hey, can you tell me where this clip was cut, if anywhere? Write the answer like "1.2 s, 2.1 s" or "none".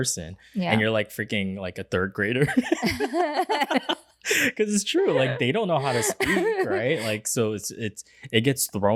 none